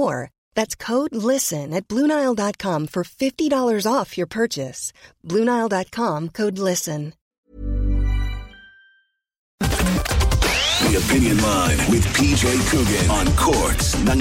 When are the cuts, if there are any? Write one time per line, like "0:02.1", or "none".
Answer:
0:07.4
0:09.6